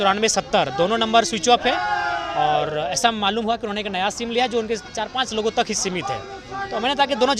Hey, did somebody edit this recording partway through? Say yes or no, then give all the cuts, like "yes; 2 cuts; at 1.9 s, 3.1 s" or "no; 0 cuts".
no; 0 cuts